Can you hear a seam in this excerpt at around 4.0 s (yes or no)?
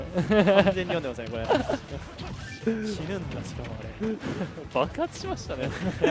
no